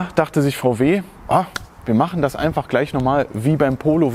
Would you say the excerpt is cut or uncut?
uncut